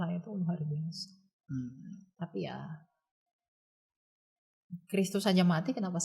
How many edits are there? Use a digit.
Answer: 0